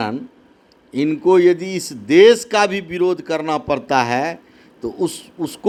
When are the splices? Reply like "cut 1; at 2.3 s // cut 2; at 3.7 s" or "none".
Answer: none